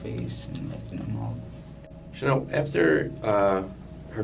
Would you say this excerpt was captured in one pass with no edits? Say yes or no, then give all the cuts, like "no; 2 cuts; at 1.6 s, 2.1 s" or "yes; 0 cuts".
no; 1 cut; at 1.7 s